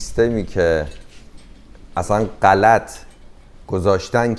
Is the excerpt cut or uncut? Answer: uncut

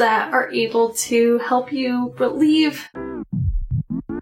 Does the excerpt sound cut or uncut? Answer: cut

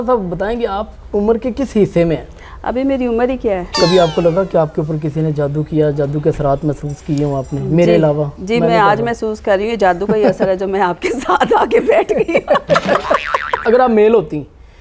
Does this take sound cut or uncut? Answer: cut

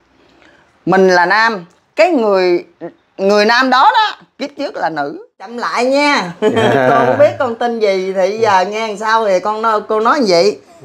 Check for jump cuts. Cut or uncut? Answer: cut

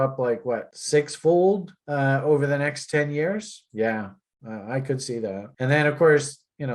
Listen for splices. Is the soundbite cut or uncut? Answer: uncut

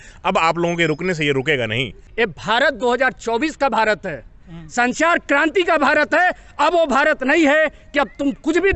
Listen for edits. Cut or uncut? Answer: cut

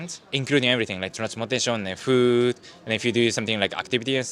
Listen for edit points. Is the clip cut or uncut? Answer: uncut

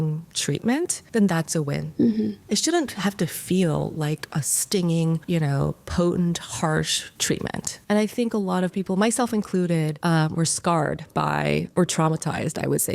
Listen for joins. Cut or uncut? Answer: cut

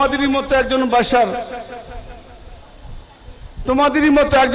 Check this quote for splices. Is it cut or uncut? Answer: uncut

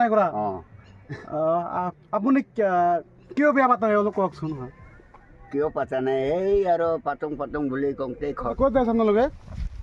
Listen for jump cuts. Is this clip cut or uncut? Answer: cut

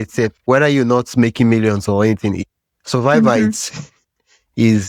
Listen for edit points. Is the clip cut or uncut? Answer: uncut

